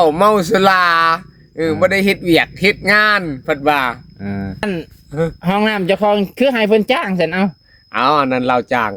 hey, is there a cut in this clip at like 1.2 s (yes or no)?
no